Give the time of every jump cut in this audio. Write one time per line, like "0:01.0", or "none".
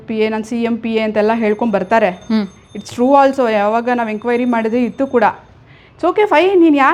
none